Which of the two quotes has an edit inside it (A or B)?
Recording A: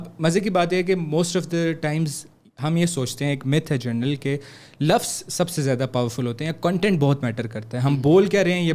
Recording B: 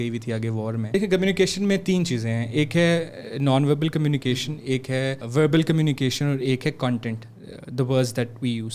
B